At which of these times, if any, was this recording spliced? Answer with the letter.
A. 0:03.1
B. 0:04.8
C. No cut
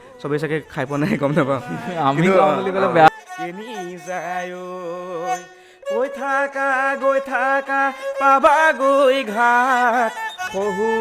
A